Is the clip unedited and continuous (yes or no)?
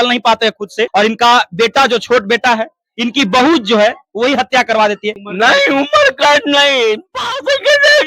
no